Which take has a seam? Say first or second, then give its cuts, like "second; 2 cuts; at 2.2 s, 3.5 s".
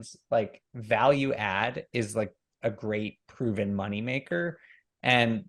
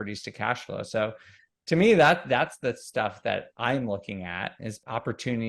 second; 1 cut; at 4.6 s